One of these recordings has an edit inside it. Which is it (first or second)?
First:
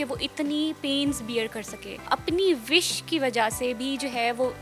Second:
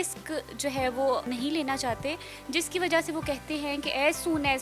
first